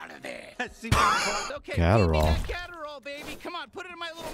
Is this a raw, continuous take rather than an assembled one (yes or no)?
no